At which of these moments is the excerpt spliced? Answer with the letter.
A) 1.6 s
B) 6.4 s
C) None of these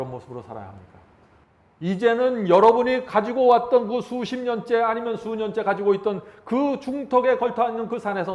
C